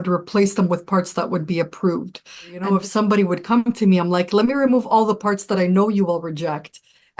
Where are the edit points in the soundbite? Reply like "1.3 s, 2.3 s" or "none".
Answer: 2.5 s